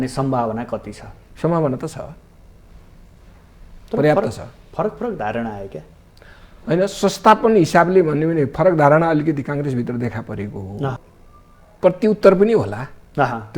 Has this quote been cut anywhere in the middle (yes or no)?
yes